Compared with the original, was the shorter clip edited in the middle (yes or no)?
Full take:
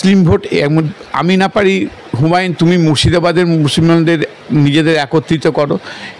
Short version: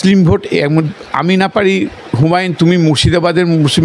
no